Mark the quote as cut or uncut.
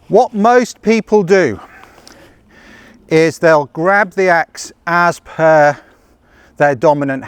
uncut